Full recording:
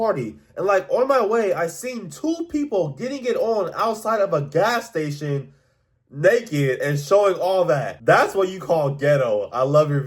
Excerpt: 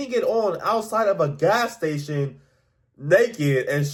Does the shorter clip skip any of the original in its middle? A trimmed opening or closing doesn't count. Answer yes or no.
no